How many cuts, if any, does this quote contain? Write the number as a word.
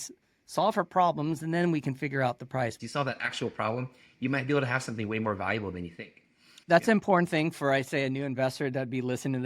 two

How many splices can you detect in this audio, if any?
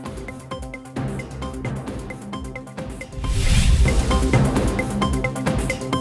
zero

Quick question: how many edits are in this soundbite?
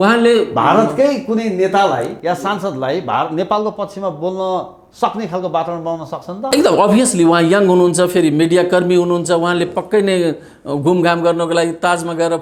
zero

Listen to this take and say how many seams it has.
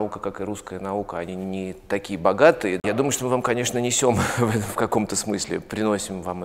one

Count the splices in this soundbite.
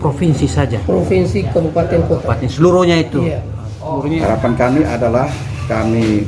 one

